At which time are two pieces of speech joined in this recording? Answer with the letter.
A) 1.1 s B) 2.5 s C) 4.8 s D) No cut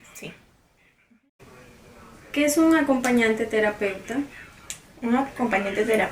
A